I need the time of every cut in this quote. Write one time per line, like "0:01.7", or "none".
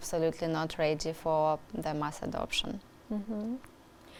none